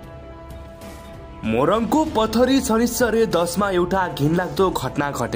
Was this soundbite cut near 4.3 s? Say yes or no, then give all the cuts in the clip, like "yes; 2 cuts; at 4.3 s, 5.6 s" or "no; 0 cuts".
no; 1 cut; at 1.4 s